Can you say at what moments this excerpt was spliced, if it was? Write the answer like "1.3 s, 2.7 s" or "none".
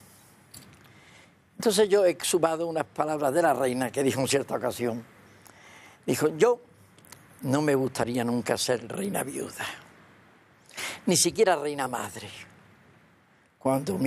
12.4 s